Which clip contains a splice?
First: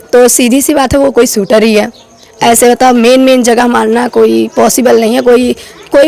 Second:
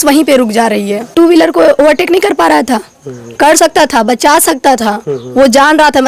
second; 1 cut; at 1.1 s

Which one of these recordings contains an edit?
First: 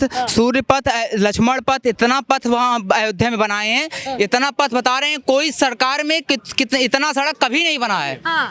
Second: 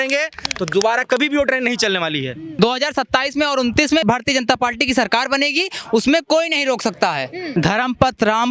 second; 3 cuts; at 2.6 s, 4.0 s, 7.5 s

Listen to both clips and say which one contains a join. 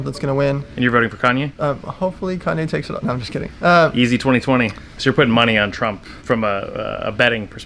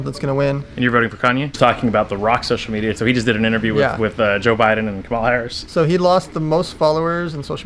second; 3 cuts; at 1.6 s, 3.0 s, 5.6 s

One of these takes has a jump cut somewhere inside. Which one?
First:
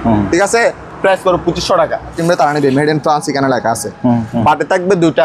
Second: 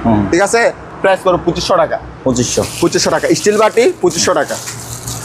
first; 2 cuts; at 2.2 s, 4.3 s

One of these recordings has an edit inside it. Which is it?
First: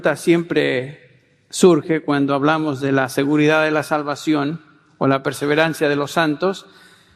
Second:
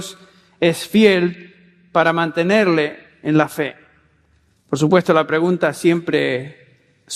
first; 1 cut; at 3.0 s

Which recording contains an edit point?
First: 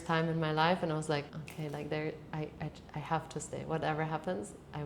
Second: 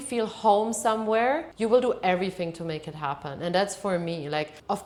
first; 1 cut; at 1.4 s

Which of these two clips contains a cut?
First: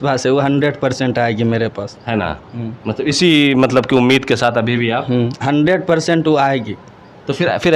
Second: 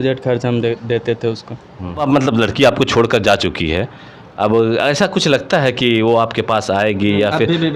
second; 1 cut; at 2.0 s

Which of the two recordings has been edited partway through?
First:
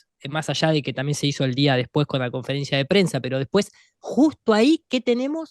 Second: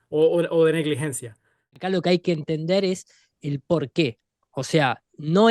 second; 1 cut; at 1.7 s

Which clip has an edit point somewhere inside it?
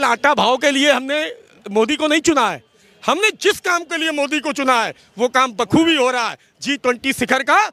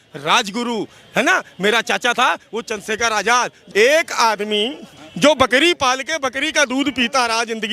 second; 1 cut; at 3.6 s

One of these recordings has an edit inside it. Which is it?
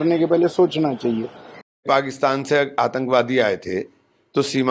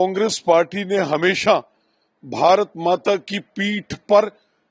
first; 1 cut; at 1.8 s

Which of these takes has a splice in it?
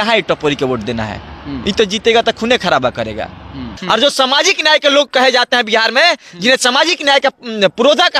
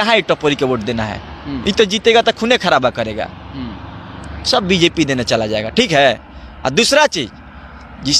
first; 1 cut; at 3.7 s

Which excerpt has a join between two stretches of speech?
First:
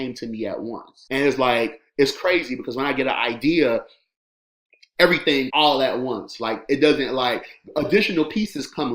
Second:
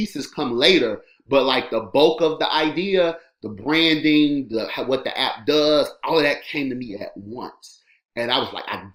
first; 2 cuts; at 0.9 s, 5.5 s

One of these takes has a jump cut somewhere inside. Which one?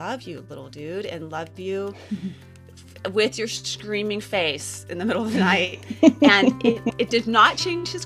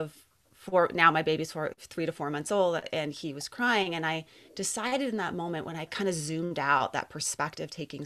second; 1 cut; at 5.9 s

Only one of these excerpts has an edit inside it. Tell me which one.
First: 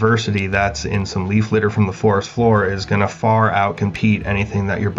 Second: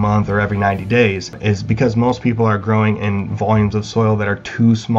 second; 1 cut; at 1.4 s

